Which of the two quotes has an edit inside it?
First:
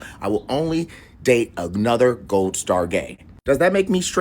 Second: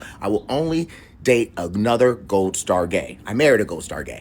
first; 1 cut; at 3.2 s

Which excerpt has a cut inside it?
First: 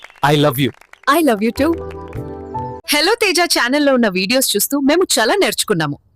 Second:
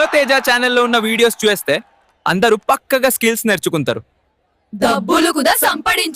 first; 1 cut; at 2.8 s

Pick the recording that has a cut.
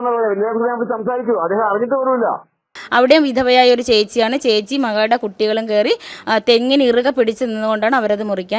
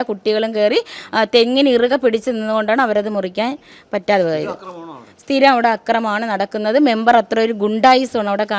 first; 1 cut; at 2.8 s

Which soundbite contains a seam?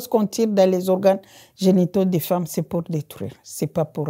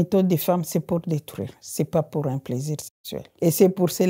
second; 1 cut; at 3.2 s

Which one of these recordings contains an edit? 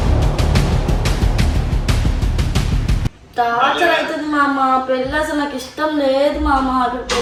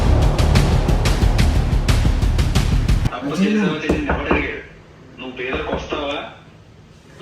second; 1 cut; at 3.1 s

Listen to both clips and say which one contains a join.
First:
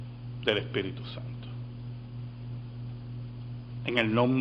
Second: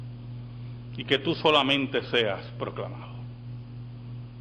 second; 1 cut; at 1.2 s

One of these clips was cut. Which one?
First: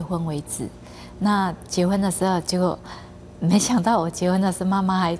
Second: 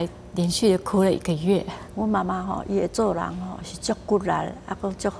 second; 1 cut; at 1.8 s

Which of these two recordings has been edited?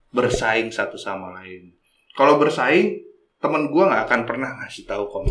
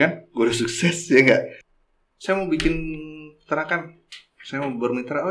second; 1 cut; at 1.5 s

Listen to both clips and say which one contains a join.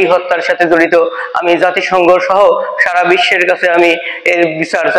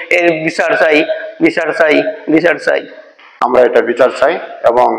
second; 1 cut; at 3.3 s

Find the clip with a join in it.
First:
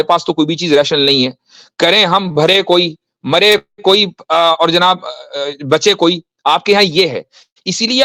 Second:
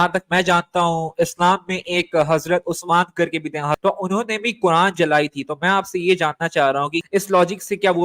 second; 2 cuts; at 3.8 s, 7.0 s

